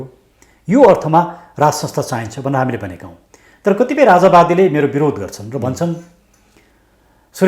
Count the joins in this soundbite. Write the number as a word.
zero